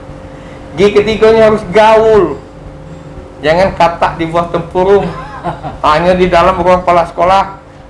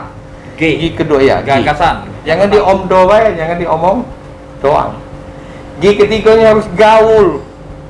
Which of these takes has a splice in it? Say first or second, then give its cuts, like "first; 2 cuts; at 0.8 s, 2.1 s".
second; 1 cut; at 2.1 s